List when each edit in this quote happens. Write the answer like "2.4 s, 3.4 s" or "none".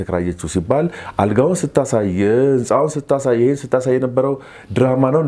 none